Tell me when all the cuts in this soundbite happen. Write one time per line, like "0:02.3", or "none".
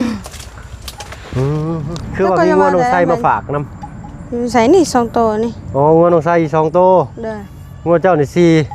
0:01.8